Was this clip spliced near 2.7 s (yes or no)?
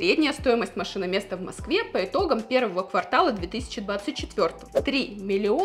no